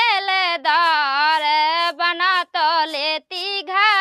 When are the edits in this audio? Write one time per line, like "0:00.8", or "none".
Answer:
none